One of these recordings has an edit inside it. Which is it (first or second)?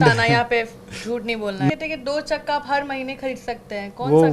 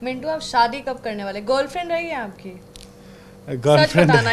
first